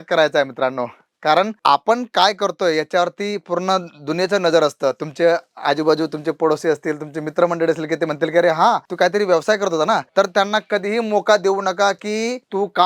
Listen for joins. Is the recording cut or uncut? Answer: uncut